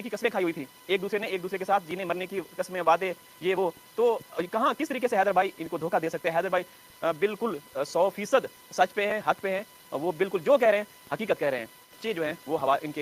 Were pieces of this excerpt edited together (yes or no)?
yes